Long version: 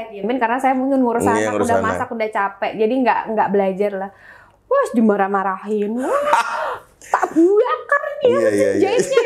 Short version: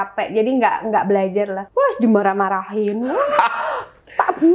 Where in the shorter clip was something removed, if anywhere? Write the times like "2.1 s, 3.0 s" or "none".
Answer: 1.6 s